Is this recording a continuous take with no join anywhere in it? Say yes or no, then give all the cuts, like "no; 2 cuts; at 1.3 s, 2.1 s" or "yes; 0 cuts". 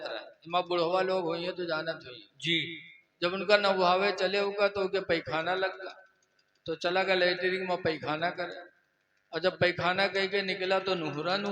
yes; 0 cuts